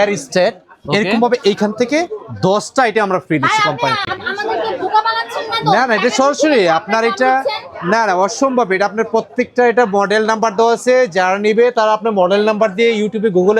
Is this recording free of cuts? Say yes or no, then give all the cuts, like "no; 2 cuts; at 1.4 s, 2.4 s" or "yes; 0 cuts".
yes; 0 cuts